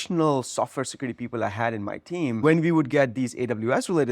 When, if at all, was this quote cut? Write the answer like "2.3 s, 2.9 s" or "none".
2.4 s